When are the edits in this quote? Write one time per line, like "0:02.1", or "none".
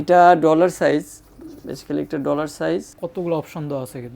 none